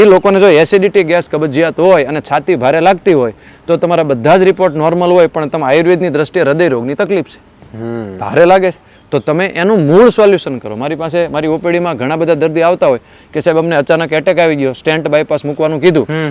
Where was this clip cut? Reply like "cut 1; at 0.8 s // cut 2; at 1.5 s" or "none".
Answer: none

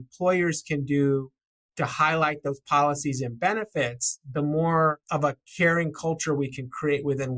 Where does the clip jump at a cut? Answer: cut 1; at 5.0 s

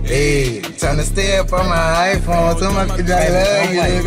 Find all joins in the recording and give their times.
none

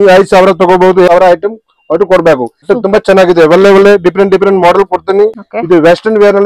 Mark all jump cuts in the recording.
cut 1; at 1.1 s // cut 2; at 2.6 s // cut 3; at 5.5 s

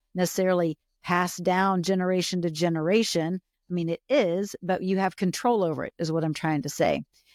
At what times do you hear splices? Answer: none

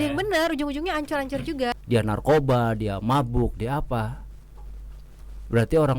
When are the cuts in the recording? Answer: cut 1; at 1.8 s

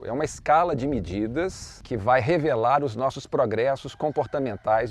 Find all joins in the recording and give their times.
cut 1; at 1.7 s

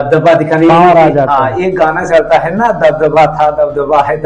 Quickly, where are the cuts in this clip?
none

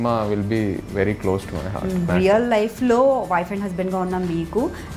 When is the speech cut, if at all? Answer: cut 1; at 2.1 s

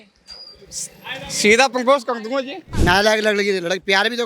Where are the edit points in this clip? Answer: cut 1; at 2.6 s

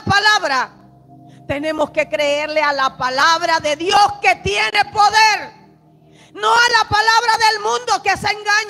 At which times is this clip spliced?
none

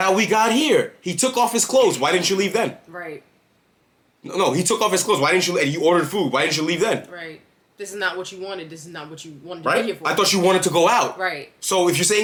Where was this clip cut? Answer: none

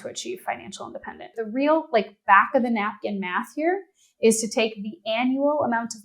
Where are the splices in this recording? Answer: cut 1; at 1.4 s

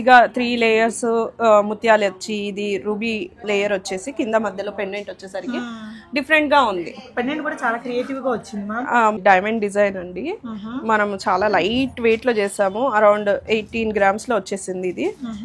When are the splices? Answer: cut 1; at 3.4 s // cut 2; at 9.2 s

